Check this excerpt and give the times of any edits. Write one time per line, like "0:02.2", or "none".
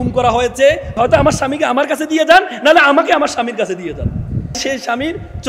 0:00.9
0:04.6